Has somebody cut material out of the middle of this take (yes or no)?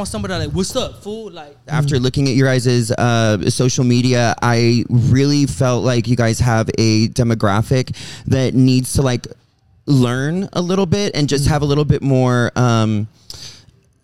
yes